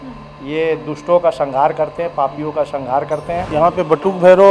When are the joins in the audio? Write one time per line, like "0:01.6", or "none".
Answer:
0:03.5